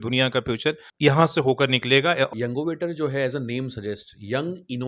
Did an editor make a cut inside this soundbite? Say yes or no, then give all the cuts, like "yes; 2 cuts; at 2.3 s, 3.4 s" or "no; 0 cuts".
yes; 2 cuts; at 0.9 s, 2.3 s